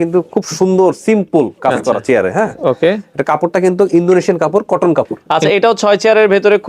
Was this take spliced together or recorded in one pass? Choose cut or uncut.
cut